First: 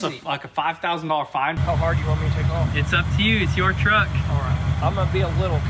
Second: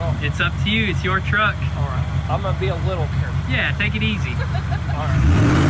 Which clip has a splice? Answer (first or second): first